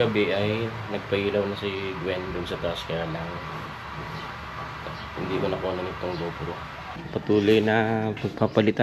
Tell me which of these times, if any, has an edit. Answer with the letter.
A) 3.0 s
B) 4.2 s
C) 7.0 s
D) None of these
C